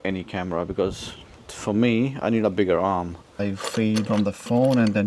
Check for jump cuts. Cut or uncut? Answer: cut